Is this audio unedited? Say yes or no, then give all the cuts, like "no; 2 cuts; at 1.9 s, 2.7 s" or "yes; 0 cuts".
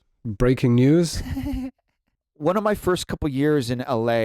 no; 1 cut; at 2.3 s